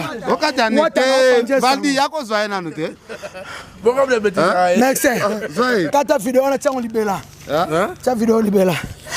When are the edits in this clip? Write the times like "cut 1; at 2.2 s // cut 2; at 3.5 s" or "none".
none